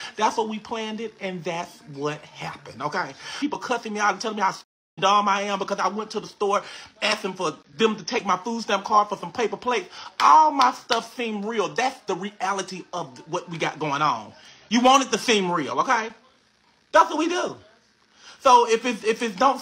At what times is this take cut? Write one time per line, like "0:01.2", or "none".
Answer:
0:03.3